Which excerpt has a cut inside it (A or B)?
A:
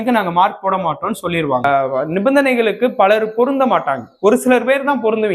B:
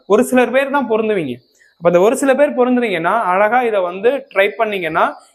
A